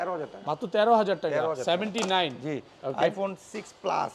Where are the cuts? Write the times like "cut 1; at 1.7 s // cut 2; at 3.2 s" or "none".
none